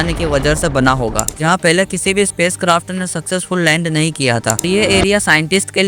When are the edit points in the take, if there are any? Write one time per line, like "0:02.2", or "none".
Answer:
0:01.3
0:04.6